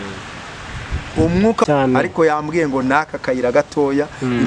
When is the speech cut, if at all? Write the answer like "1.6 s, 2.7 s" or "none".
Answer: 1.7 s